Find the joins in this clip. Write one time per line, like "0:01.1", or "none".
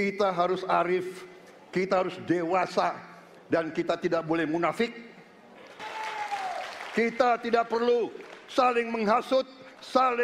0:05.8